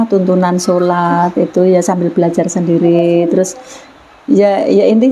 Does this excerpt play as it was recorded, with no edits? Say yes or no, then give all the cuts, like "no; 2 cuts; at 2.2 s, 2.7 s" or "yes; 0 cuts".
yes; 0 cuts